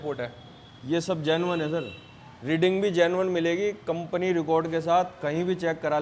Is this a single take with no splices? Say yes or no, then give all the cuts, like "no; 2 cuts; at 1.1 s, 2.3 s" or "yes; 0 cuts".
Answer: yes; 0 cuts